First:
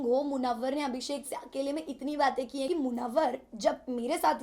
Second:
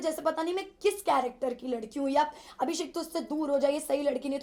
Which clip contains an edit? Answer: first; 1 cut; at 2.7 s

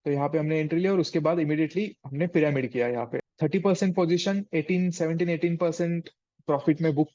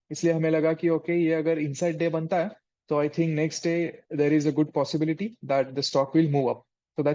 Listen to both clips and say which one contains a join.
first; 1 cut; at 3.1 s

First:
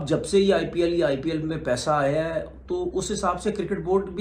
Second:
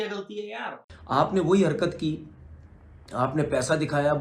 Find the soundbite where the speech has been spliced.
second; 1 cut; at 0.9 s

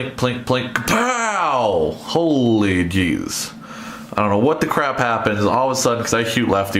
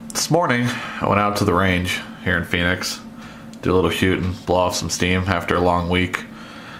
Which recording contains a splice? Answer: first; 1 cut; at 2.0 s

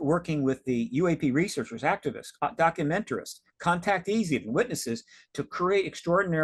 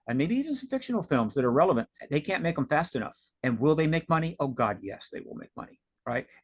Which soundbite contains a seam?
second; 1 cut; at 2.0 s

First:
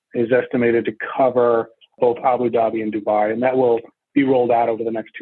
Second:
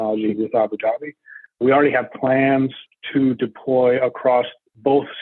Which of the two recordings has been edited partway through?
second; 2 cuts; at 1.6 s, 2.8 s

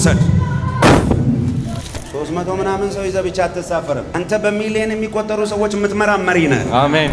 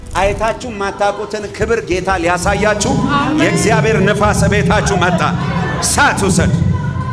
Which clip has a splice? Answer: first; 2 cuts; at 1.7 s, 4.1 s

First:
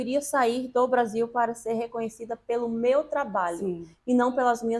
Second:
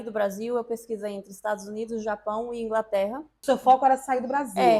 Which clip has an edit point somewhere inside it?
second; 1 cut; at 3.3 s

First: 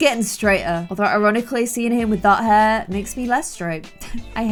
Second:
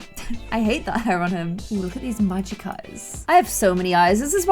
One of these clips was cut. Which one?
second; 2 cuts; at 1.7 s, 3.1 s

